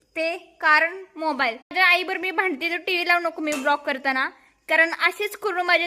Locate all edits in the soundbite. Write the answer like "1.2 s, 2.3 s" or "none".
1.7 s